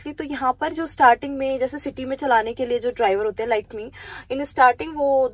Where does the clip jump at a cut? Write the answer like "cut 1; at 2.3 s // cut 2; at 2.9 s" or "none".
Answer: none

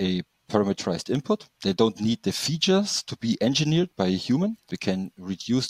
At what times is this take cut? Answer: cut 1; at 4.7 s

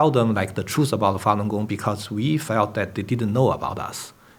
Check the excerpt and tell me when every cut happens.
none

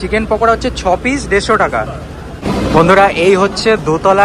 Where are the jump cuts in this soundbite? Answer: cut 1; at 2.3 s

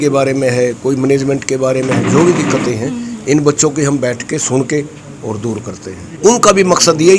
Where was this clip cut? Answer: cut 1; at 6.1 s

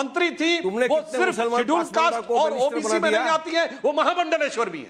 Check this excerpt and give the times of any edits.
none

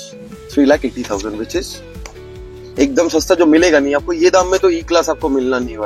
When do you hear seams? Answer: none

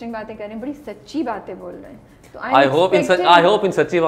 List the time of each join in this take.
none

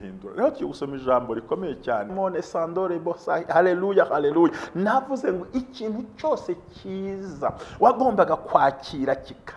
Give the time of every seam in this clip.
cut 1; at 2.1 s

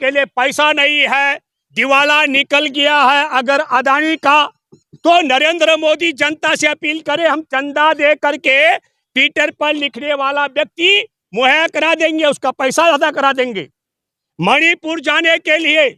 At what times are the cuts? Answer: none

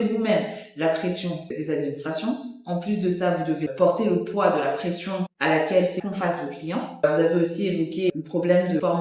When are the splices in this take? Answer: none

